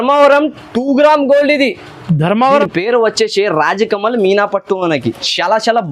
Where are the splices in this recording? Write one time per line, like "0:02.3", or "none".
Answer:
0:02.6